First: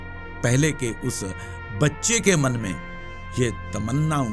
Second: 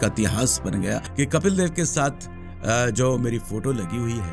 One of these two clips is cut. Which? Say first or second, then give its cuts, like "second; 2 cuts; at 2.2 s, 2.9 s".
second; 1 cut; at 1.1 s